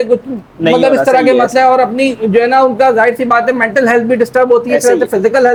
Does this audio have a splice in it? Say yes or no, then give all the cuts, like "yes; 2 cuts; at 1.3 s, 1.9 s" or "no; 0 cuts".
no; 0 cuts